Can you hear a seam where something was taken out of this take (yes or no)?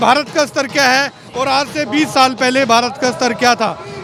no